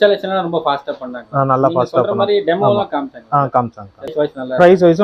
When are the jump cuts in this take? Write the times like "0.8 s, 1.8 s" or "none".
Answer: 4.1 s